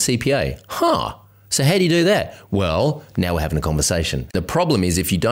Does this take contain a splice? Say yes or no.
yes